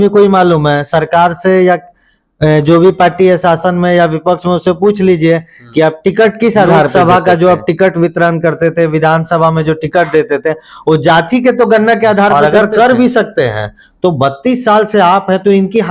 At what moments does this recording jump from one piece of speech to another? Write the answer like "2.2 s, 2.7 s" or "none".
6.9 s, 12.3 s